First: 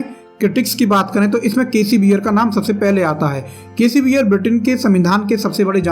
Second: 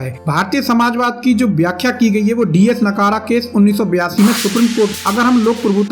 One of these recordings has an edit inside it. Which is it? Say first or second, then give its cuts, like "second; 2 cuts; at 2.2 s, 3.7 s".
second; 1 cut; at 4.9 s